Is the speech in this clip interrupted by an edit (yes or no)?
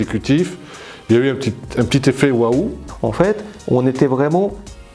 no